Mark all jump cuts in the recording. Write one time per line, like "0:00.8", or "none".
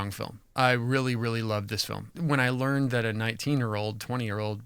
0:02.1

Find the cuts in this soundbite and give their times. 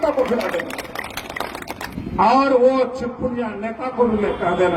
0:01.9

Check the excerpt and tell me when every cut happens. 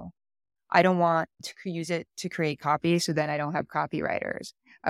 0:01.5

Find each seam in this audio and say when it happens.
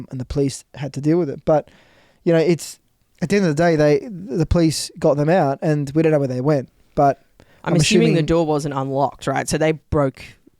none

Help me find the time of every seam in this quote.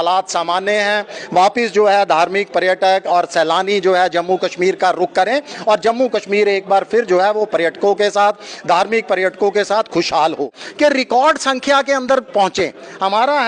0:10.6

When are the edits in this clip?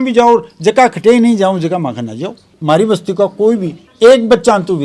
0:02.6

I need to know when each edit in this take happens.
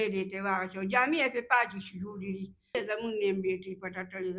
0:02.8

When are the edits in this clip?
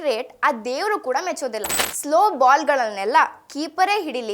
0:01.9

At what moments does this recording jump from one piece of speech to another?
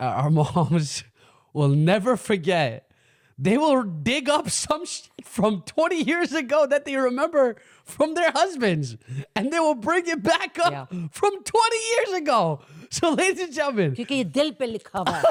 none

